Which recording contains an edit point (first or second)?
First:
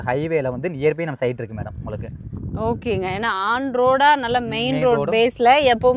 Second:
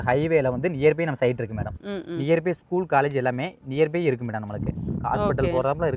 second